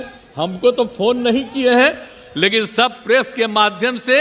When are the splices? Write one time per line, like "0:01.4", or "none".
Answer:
none